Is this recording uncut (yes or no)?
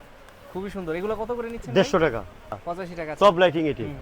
no